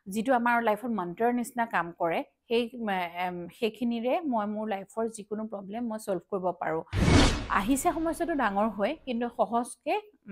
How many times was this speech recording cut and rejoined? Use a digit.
1